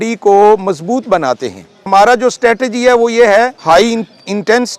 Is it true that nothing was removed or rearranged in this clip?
no; 2 cuts; at 1.8 s, 3.6 s

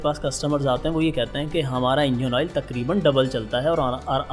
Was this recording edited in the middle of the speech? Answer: no; 0 cuts

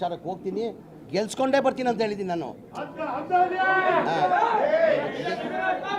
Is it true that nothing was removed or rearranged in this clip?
yes; 0 cuts

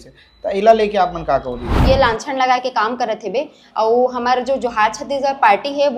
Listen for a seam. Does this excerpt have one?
yes; 1 cut; at 1.8 s

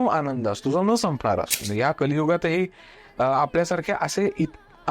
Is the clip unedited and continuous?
no; 1 cut; at 1.6 s

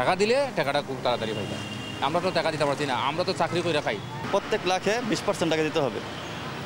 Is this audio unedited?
yes; 0 cuts

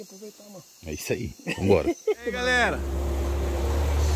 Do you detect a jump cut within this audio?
yes; 1 cut; at 2.6 s

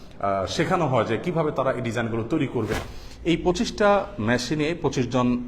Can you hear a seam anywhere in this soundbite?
yes; 1 cut; at 2.7 s

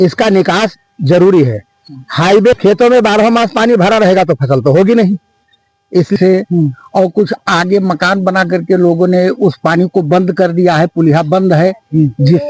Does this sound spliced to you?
yes; 2 cuts; at 2.5 s, 6.2 s

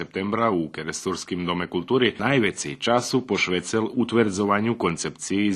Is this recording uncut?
no; 1 cut; at 2.2 s

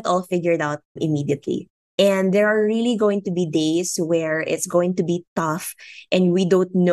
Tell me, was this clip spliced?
yes; 1 cut; at 0.9 s

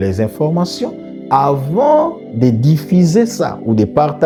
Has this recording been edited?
no; 0 cuts

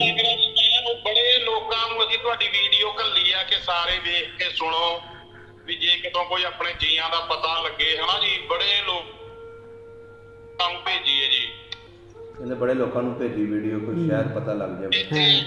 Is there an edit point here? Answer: no; 0 cuts

